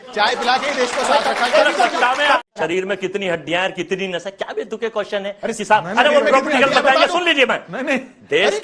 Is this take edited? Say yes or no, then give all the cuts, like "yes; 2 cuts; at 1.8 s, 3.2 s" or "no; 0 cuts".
yes; 1 cut; at 2.4 s